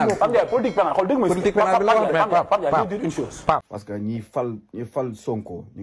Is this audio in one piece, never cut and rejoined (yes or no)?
no